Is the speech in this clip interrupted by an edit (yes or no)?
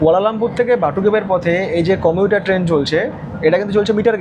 no